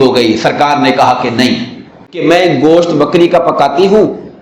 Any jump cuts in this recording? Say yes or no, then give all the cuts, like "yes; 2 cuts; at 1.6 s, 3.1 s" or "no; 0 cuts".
yes; 1 cut; at 2.0 s